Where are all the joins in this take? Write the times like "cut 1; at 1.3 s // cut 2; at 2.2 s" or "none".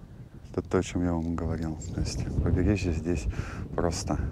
none